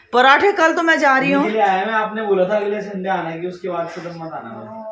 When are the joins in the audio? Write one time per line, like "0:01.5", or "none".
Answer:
none

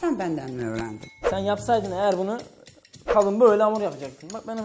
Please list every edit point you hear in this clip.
0:01.1

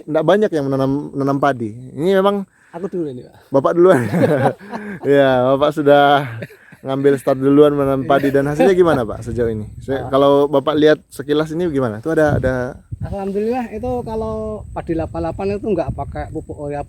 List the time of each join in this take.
none

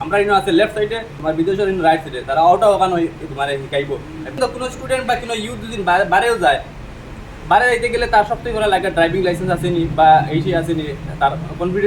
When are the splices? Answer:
0:01.1
0:04.4

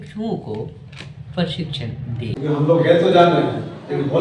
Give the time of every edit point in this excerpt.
0:02.3

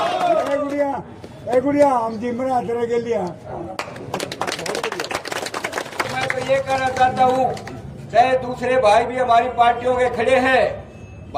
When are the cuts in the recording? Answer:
0:06.1

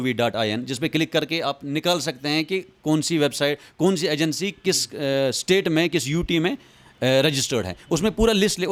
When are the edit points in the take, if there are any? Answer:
none

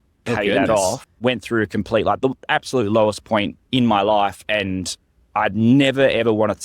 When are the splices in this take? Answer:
0:01.1
0:03.6

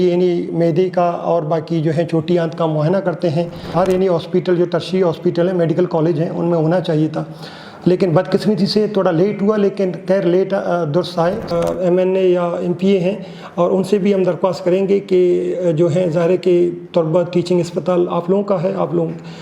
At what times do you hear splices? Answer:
0:03.6
0:11.5

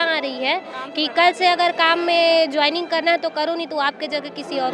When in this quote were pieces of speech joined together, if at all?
none

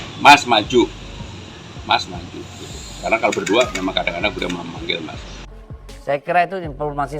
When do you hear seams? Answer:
0:05.4

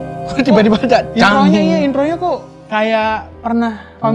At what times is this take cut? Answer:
none

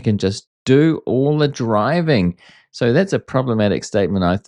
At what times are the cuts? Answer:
none

